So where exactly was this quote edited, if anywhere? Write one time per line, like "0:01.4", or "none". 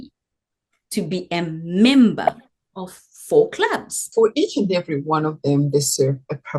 0:04.0